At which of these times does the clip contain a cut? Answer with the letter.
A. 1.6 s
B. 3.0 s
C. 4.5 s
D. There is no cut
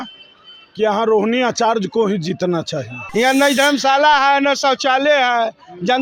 B